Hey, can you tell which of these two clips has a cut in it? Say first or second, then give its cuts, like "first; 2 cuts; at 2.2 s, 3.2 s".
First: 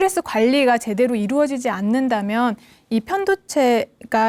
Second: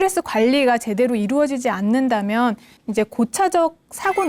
second; 1 cut; at 2.7 s